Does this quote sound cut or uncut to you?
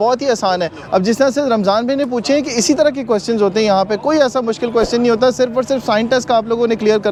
uncut